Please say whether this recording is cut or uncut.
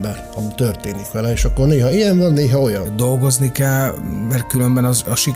cut